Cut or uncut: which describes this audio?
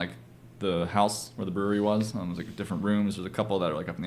uncut